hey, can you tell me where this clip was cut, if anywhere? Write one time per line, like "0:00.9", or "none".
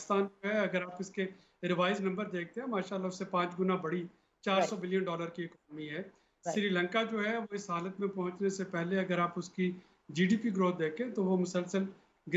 none